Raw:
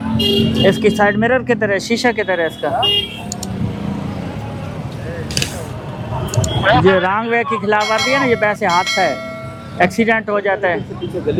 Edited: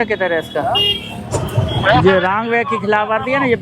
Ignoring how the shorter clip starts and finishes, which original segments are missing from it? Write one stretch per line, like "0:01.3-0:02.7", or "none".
0:03.3-0:06.0